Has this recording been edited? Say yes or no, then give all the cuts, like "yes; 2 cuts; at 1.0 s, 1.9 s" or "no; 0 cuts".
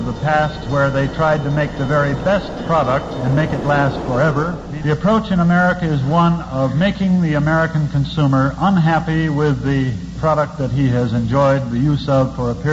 yes; 1 cut; at 4.7 s